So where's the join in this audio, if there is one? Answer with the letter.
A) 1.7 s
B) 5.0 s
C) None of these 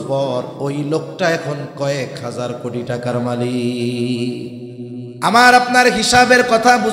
B